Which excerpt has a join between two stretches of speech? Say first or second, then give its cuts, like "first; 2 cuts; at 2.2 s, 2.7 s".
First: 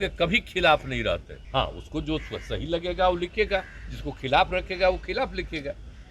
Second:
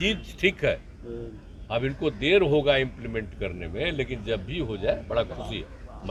first; 1 cut; at 1.4 s